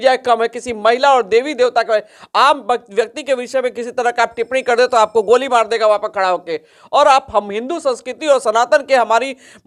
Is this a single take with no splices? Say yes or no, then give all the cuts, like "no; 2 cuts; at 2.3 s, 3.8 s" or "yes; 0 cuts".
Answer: yes; 0 cuts